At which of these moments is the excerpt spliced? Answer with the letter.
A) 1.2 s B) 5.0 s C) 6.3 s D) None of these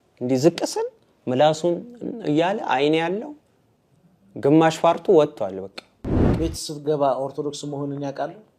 C